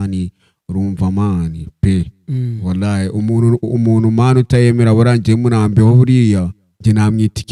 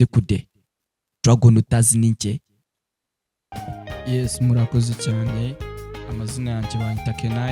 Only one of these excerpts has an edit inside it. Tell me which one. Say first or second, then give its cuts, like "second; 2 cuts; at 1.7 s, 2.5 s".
second; 1 cut; at 3.5 s